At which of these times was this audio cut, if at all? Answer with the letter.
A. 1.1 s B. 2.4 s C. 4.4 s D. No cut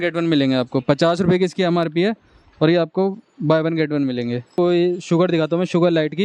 C